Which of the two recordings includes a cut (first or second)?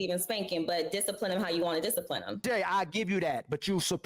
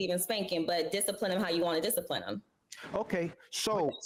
first